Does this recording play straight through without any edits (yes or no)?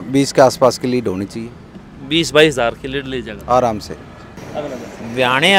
no